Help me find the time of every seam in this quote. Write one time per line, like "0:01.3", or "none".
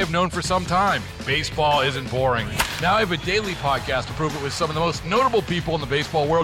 none